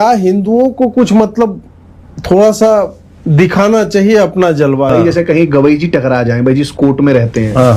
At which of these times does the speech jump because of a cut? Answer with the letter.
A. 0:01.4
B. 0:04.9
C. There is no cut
B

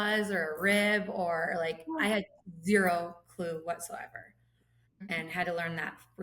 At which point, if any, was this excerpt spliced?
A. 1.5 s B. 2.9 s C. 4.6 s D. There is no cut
C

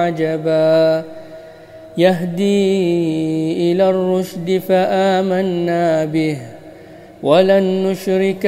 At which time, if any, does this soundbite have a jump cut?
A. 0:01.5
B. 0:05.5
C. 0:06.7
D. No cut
D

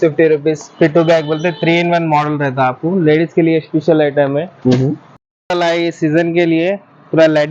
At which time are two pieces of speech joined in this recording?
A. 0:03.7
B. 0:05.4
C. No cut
B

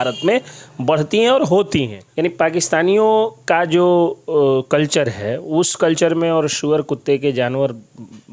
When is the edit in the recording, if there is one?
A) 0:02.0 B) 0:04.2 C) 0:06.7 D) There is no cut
A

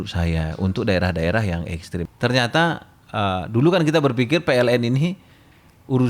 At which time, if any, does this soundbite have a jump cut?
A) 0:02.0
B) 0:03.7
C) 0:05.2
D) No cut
A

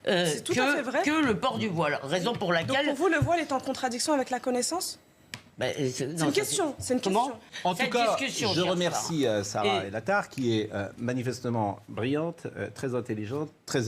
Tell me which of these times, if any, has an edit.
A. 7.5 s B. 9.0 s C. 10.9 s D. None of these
A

